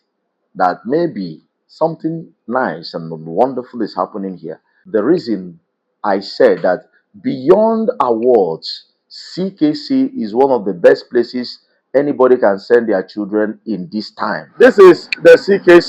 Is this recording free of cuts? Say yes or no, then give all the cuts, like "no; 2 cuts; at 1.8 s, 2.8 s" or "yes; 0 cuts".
no; 2 cuts; at 4.8 s, 14.5 s